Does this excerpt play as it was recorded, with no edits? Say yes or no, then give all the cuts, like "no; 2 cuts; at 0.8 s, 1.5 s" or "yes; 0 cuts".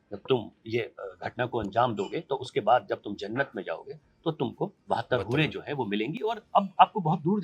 yes; 0 cuts